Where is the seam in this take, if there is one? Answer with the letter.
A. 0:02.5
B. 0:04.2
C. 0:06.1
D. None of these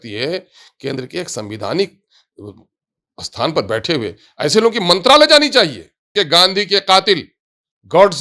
C